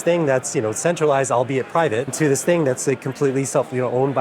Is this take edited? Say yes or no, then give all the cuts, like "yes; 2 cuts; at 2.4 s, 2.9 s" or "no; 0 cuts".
yes; 1 cut; at 2.1 s